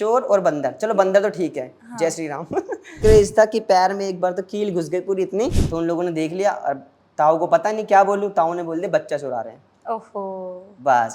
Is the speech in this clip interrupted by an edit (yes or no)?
yes